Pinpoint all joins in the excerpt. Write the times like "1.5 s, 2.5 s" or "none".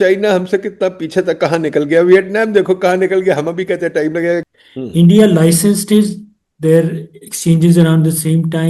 4.5 s